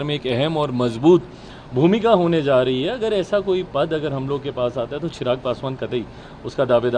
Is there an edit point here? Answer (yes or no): no